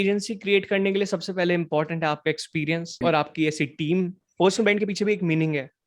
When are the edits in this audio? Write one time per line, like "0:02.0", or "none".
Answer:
0:02.9
0:04.2